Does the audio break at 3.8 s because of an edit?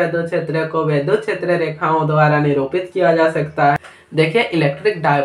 yes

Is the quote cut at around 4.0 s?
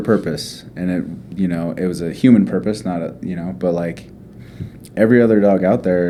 no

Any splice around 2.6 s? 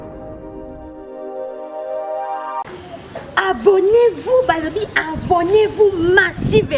yes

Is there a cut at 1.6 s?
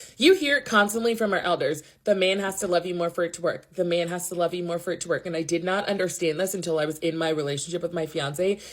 yes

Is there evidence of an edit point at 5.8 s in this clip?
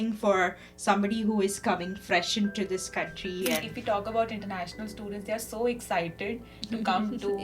no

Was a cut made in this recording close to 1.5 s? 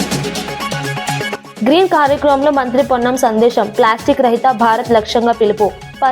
yes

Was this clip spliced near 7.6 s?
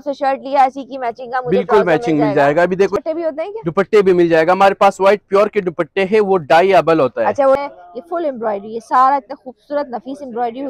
yes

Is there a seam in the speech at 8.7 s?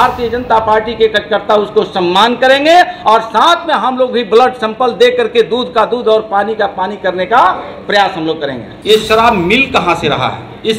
yes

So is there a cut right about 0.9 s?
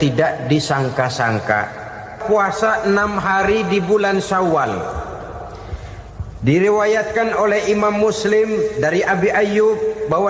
no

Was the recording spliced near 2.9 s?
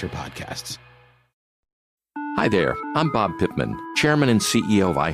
no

